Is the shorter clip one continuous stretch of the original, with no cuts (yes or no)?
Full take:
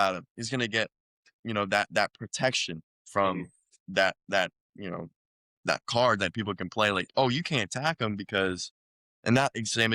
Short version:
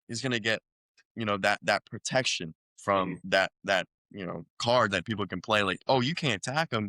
no